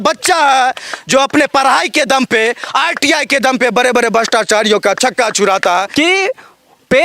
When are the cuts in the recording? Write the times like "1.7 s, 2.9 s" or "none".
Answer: 5.9 s